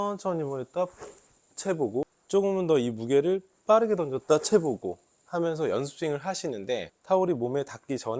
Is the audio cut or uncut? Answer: cut